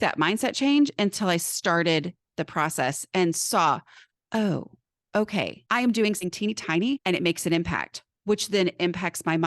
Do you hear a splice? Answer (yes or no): yes